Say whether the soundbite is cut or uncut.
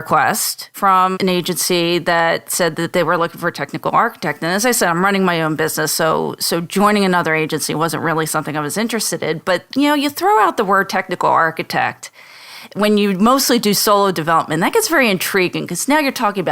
cut